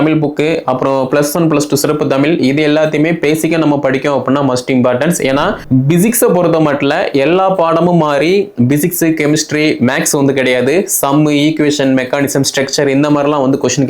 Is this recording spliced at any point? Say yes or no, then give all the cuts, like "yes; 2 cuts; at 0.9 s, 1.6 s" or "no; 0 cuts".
yes; 1 cut; at 5.6 s